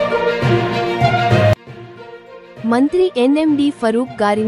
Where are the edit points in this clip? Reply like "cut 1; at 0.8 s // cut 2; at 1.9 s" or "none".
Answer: cut 1; at 1.6 s